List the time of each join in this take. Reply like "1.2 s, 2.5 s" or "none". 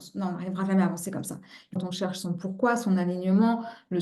1.8 s

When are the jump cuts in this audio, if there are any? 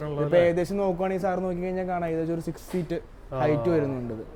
none

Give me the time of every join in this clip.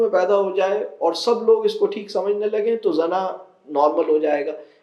none

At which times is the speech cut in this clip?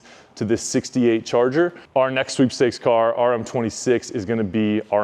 1.8 s

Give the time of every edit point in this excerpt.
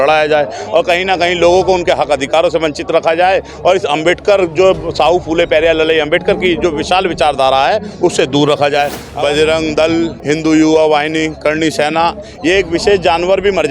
9.0 s, 10.2 s

